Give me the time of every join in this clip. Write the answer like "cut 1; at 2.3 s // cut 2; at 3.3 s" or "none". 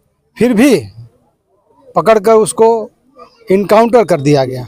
none